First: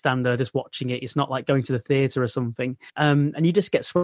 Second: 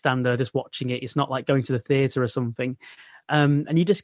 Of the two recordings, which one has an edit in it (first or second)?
first